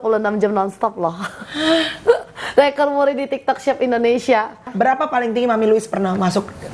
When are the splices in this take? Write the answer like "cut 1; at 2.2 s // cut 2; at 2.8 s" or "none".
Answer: cut 1; at 4.7 s